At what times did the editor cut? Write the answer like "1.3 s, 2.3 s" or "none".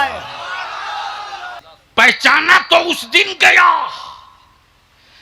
1.6 s